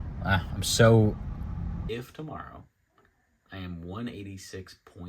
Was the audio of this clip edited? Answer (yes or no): yes